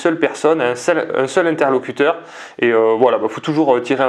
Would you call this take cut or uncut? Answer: uncut